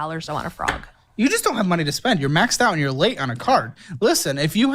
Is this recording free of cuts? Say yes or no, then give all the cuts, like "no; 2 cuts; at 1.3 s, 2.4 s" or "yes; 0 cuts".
no; 1 cut; at 1.9 s